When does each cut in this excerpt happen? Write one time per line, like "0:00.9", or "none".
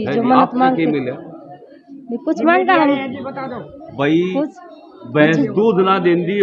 none

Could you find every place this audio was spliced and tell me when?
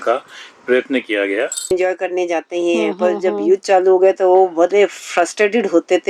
0:01.7

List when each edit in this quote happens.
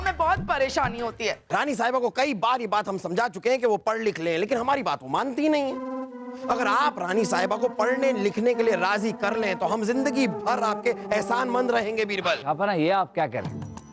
0:01.4

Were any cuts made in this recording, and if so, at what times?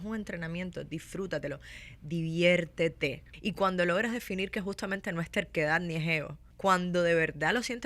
0:03.3
0:06.5

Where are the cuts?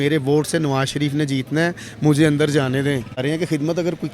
0:03.2

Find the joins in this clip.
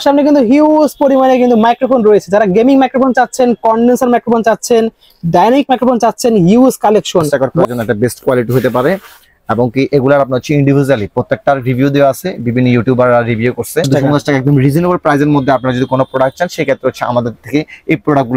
0:07.3
0:13.9

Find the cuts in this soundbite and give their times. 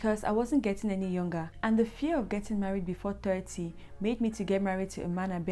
0:01.5

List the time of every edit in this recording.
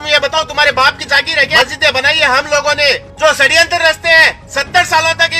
0:01.5
0:03.1

